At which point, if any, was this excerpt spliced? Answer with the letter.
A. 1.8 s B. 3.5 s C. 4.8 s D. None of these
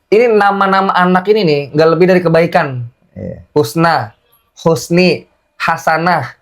D